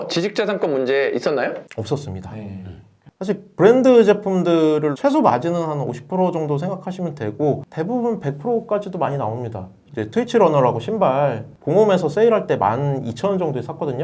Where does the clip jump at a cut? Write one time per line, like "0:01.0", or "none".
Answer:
0:03.0
0:05.0
0:09.8